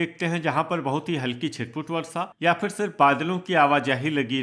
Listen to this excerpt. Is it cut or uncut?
uncut